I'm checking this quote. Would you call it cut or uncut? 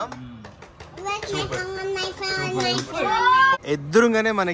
cut